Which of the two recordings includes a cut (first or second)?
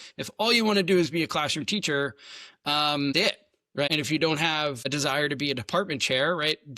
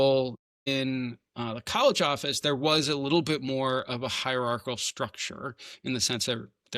first